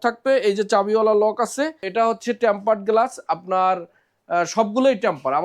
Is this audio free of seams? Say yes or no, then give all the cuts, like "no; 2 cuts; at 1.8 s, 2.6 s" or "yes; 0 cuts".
no; 1 cut; at 1.8 s